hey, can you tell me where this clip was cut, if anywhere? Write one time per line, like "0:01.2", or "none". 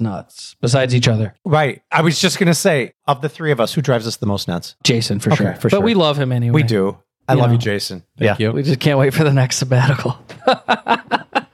0:03.0